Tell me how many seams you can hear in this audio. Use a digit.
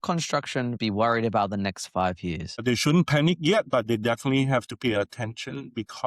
2